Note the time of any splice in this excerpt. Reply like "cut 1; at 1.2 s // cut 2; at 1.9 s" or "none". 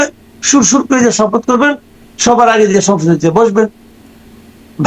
none

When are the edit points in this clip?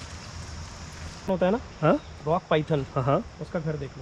cut 1; at 1.3 s

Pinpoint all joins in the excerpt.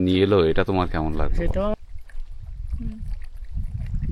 cut 1; at 1.7 s

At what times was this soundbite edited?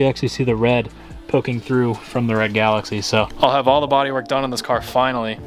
cut 1; at 3.3 s

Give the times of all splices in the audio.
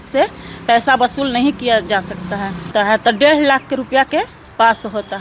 cut 1; at 2.7 s

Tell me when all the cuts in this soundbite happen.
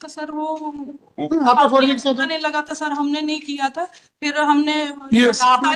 none

